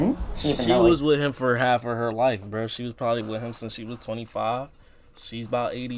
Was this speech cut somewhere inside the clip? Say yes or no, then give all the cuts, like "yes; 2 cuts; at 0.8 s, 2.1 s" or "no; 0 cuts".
no; 0 cuts